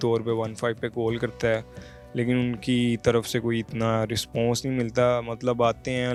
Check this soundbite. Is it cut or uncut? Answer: uncut